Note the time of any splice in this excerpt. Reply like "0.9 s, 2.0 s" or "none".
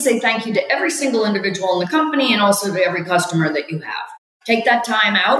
4.3 s